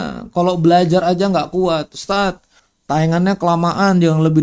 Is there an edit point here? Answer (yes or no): no